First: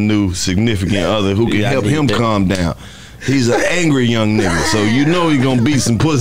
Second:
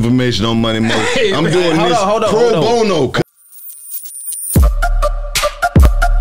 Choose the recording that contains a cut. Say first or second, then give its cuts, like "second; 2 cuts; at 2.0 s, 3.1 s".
second; 1 cut; at 3.2 s